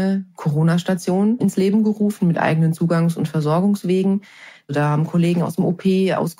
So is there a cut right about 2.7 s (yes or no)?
no